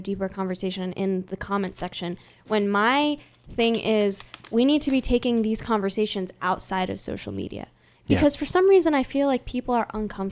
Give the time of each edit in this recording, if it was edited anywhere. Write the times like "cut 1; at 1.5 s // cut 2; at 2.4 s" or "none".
none